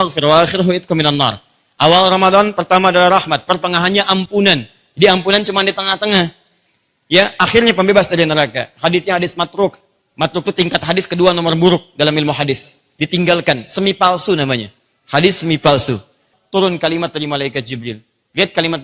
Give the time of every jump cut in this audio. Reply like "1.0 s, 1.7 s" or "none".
16.2 s